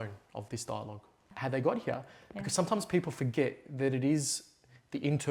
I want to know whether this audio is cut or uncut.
cut